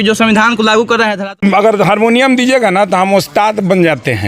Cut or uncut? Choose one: cut